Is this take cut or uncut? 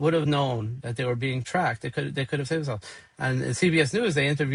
uncut